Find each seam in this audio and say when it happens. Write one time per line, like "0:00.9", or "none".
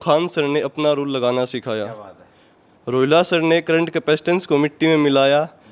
none

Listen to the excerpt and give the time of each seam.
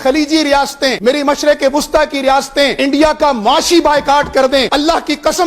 0:01.0
0:02.7
0:04.7

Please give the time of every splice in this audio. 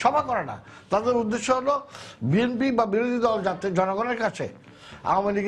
none

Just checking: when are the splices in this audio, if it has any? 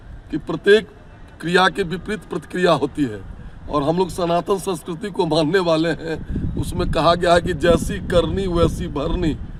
none

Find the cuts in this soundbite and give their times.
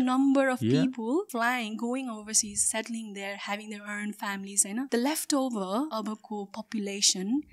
0:01.3
0:04.9
0:05.9

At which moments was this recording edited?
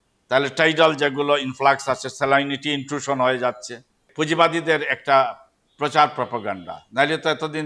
0:04.0

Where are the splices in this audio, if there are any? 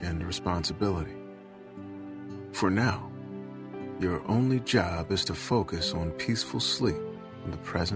none

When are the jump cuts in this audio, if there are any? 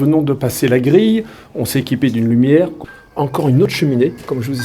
0:02.8

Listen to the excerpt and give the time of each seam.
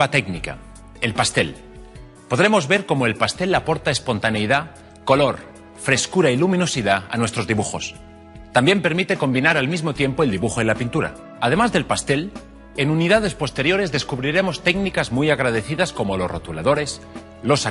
0:03.7

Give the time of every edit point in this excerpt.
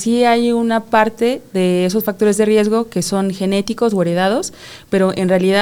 none

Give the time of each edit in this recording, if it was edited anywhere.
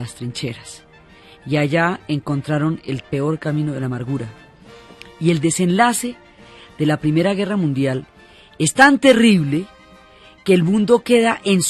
none

